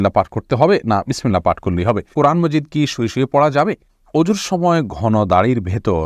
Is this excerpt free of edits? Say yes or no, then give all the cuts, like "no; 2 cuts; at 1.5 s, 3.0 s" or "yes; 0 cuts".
no; 2 cuts; at 2.1 s, 3.9 s